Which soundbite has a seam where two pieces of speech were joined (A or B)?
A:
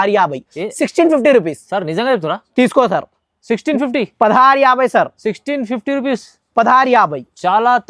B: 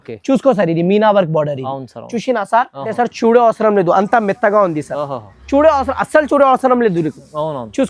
B